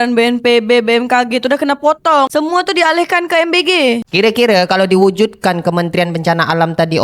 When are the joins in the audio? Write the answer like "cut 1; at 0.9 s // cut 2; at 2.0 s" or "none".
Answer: cut 1; at 4.0 s

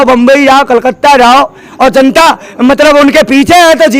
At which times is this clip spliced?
cut 1; at 1.6 s

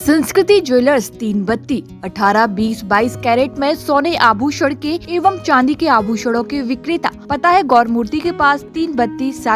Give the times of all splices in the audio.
cut 1; at 5.0 s // cut 2; at 7.2 s

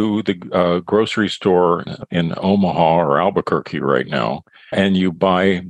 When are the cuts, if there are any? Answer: cut 1; at 1.9 s // cut 2; at 4.7 s

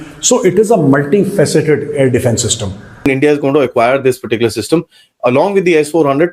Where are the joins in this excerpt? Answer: cut 1; at 3.0 s

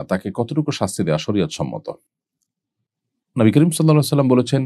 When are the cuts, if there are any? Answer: none

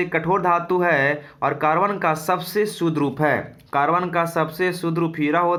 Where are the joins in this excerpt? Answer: none

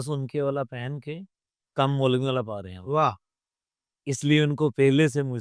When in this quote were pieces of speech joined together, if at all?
none

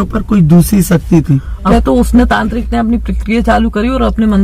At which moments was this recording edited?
cut 1; at 1.7 s

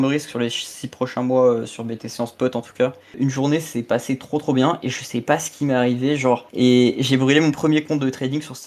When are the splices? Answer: cut 1; at 3.1 s // cut 2; at 6.5 s

